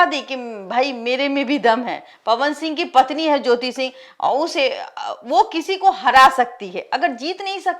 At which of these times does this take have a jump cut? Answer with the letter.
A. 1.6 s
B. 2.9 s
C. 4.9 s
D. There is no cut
D